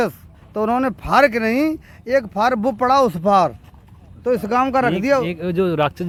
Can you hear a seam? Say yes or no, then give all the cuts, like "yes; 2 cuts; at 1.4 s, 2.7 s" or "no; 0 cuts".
no; 0 cuts